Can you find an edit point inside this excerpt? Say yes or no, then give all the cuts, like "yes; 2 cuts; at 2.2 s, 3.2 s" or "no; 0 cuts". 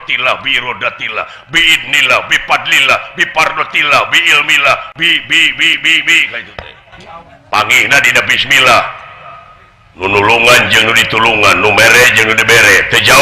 yes; 2 cuts; at 7.3 s, 9.9 s